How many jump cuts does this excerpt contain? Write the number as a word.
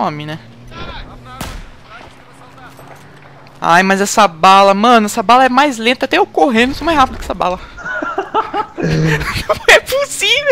zero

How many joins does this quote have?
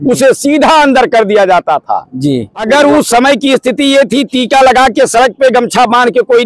one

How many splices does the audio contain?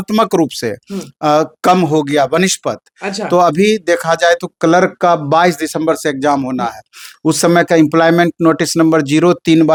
zero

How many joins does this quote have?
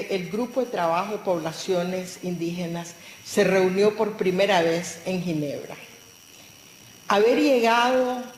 one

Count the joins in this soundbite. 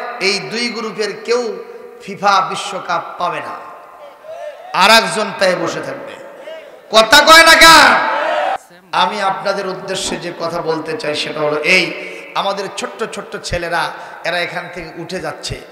one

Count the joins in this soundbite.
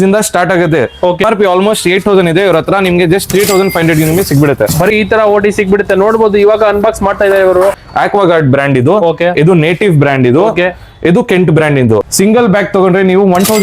four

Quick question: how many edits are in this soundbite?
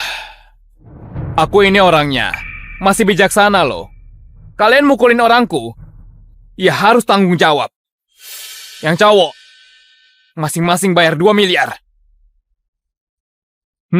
zero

